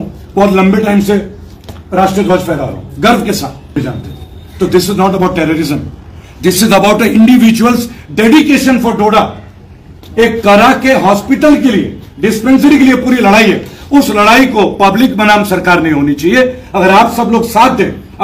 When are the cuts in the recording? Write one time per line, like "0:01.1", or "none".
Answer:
0:03.8